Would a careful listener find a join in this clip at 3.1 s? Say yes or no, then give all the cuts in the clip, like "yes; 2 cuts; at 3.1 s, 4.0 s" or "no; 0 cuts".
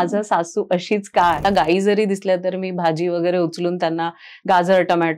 no; 1 cut; at 1.4 s